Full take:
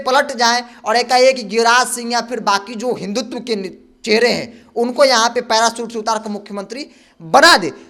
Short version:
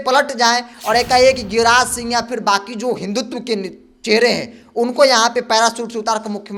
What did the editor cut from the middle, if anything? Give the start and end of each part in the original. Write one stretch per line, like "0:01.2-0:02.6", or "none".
none